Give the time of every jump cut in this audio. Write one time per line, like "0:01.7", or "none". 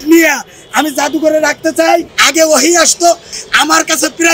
0:02.2
0:03.3